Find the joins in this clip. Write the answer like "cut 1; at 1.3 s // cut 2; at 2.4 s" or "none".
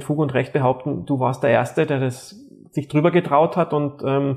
none

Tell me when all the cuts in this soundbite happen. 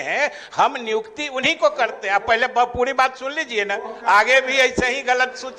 none

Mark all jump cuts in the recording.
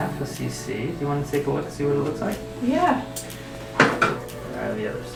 none

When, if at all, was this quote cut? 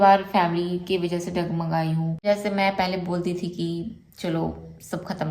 cut 1; at 2.1 s

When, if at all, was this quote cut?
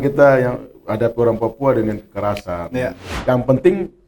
cut 1; at 3.1 s

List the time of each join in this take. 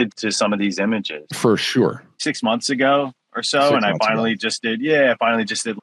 cut 1; at 2.1 s

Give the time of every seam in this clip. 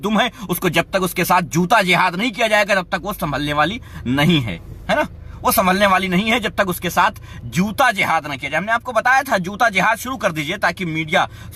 none

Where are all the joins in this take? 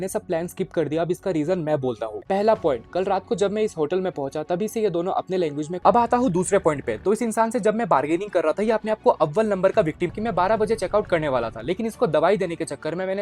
cut 1; at 2.2 s // cut 2; at 5.7 s // cut 3; at 10.1 s

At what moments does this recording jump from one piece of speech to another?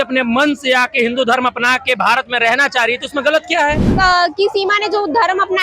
cut 1; at 3.9 s

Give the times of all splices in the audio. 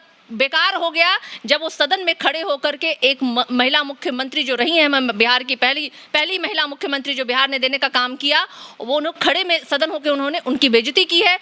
none

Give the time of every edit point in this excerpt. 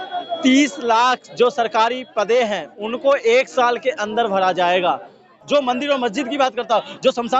cut 1; at 5.3 s

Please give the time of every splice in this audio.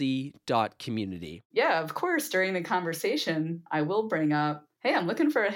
cut 1; at 1.4 s // cut 2; at 3.6 s // cut 3; at 4.7 s

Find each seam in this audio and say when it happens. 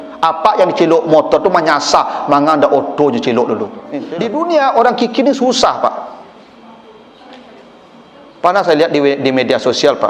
cut 1; at 4.4 s

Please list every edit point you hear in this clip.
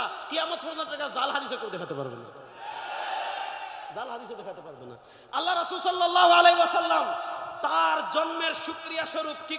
none

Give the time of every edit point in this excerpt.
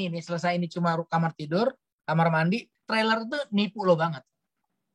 cut 1; at 2.7 s

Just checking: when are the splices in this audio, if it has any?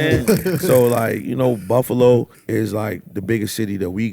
cut 1; at 2.4 s

